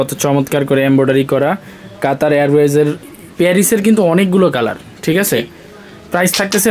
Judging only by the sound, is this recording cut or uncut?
cut